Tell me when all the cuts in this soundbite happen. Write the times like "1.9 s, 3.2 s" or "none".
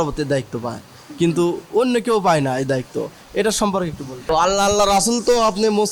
4.3 s